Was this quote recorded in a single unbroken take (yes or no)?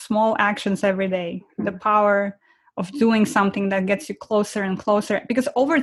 yes